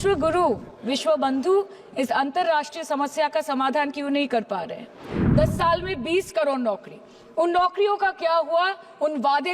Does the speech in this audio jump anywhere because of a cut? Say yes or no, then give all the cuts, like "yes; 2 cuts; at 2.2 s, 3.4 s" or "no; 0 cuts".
yes; 1 cut; at 5.2 s